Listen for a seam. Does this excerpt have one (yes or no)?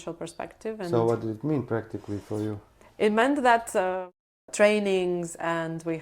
yes